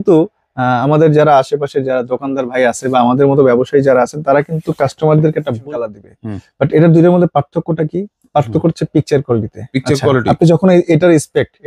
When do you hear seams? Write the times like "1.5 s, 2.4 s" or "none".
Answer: 5.5 s